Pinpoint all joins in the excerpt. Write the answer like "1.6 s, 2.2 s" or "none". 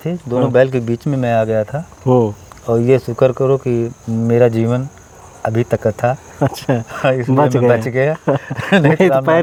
none